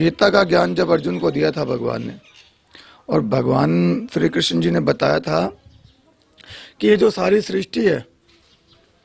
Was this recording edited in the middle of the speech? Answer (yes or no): no